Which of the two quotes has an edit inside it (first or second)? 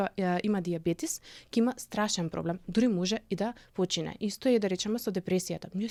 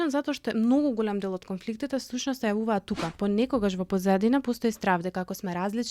second